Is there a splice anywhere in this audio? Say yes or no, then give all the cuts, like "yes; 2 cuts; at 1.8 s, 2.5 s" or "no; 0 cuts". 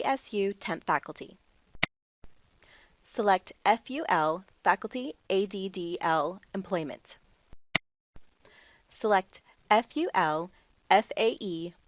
yes; 2 cuts; at 1.9 s, 7.8 s